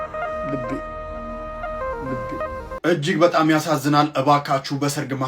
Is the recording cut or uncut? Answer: cut